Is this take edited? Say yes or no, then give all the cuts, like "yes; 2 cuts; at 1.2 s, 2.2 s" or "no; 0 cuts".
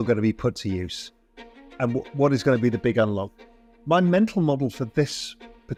no; 0 cuts